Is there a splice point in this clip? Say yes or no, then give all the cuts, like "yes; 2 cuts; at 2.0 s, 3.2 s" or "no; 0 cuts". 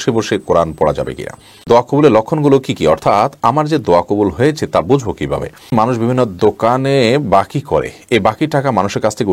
yes; 2 cuts; at 1.6 s, 5.7 s